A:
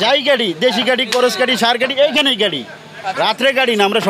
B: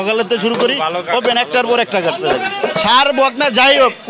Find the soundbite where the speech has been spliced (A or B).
B